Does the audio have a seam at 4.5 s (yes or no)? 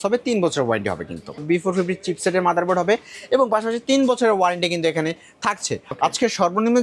no